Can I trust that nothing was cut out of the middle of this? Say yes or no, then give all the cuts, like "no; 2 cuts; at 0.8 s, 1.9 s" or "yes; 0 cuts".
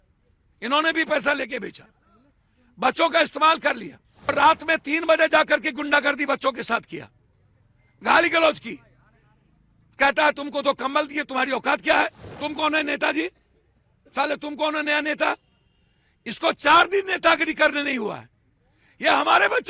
no; 2 cuts; at 4.3 s, 12.2 s